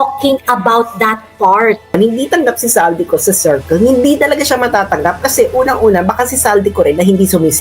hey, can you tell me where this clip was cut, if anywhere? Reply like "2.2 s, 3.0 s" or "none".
1.9 s